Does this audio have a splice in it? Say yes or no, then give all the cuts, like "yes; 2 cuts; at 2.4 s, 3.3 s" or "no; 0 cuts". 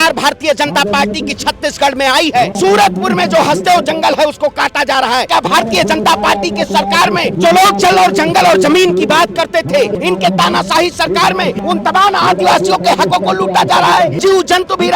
yes; 6 cuts; at 2.5 s, 5.3 s, 7.3 s, 9.9 s, 11.6 s, 14.2 s